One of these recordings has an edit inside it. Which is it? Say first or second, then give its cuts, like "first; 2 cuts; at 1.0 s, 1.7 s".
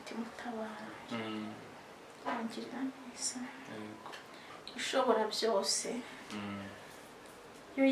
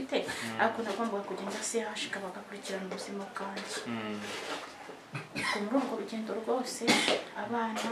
first; 1 cut; at 4.5 s